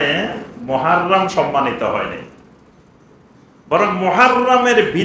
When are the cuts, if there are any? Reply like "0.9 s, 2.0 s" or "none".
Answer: none